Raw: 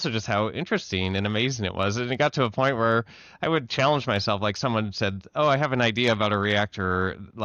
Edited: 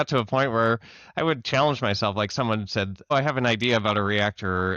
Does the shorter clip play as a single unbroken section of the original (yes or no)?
no